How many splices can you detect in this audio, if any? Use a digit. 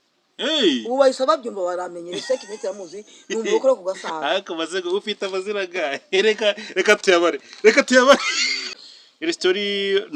1